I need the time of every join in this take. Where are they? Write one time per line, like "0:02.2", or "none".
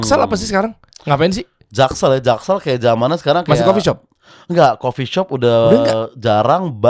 none